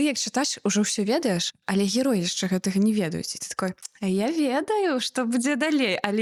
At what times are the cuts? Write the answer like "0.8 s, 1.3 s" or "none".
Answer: none